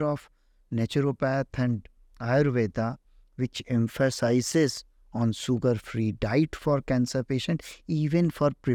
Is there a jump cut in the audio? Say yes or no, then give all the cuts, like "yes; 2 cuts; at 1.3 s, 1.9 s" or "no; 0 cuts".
no; 0 cuts